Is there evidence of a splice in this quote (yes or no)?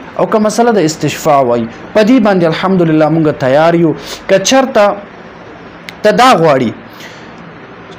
no